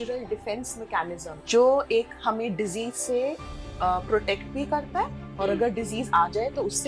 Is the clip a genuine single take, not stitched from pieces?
no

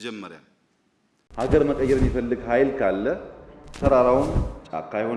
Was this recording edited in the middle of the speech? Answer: yes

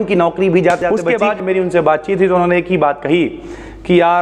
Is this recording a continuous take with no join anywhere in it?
no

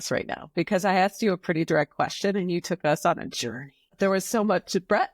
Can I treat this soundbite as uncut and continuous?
no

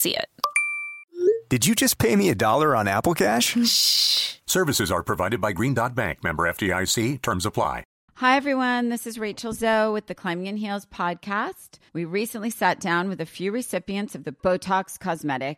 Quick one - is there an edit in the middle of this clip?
yes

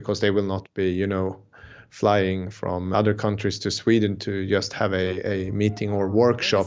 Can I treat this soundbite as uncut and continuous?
no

